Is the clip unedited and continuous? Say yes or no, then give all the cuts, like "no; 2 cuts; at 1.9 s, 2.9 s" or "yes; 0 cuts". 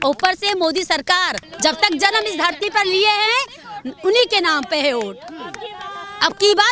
no; 1 cut; at 1.4 s